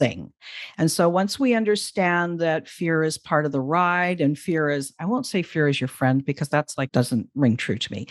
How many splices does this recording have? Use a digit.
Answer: 1